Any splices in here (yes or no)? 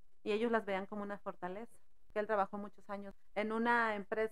yes